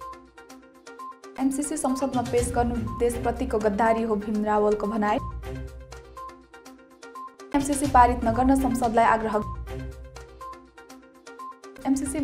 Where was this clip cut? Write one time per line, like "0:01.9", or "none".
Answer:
0:01.3